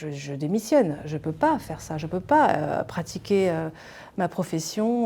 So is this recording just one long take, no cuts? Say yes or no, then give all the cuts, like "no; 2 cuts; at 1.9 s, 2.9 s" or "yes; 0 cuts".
yes; 0 cuts